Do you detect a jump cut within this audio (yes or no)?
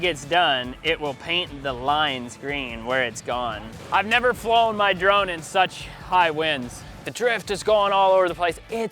yes